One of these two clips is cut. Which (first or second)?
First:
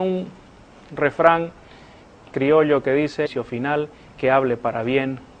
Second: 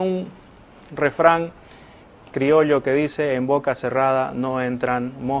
second